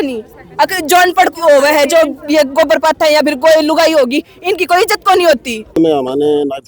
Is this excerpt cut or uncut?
cut